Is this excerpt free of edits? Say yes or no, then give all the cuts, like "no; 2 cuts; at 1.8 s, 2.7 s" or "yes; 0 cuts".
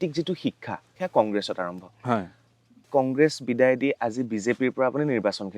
no; 2 cuts; at 0.9 s, 2.9 s